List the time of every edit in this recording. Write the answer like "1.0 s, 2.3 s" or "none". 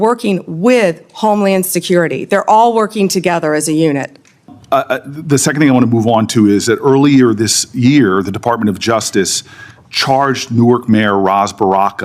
4.5 s

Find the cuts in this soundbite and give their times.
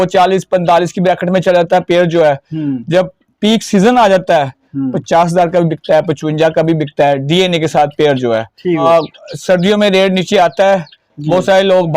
8.8 s

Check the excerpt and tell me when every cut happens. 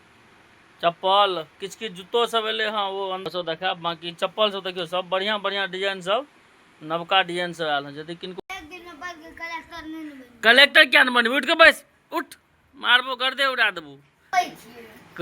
3.2 s, 8.4 s, 14.3 s

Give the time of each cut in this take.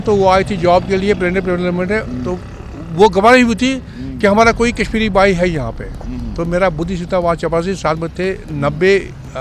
none

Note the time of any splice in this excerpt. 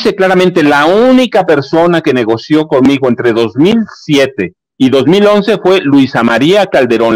none

